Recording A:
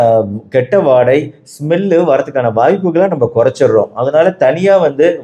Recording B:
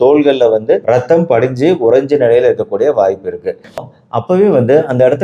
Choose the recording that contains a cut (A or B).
B